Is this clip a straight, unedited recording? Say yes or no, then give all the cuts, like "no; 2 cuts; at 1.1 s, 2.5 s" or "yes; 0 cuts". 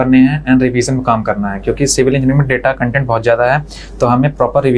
yes; 0 cuts